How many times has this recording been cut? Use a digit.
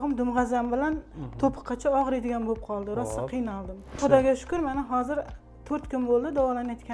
1